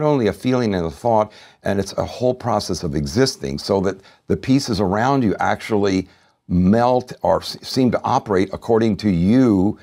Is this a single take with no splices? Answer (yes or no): yes